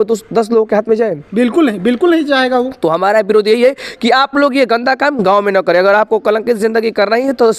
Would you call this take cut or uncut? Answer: uncut